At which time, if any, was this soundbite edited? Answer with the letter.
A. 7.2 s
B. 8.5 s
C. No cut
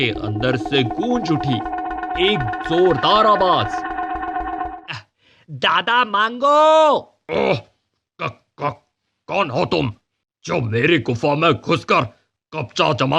A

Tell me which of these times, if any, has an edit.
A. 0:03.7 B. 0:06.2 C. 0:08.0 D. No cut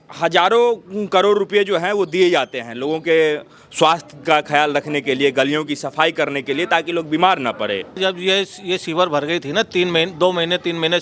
C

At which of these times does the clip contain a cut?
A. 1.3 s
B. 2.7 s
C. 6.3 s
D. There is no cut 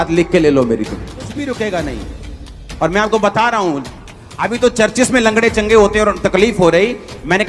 A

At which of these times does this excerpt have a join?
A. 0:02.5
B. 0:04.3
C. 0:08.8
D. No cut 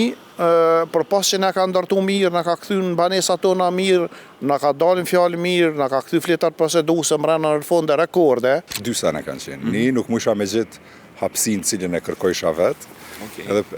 C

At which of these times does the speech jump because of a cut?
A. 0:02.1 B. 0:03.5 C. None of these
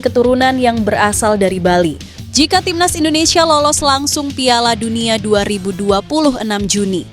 A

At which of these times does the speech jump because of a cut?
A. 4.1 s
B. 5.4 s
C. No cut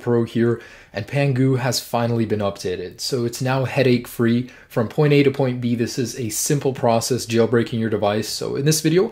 C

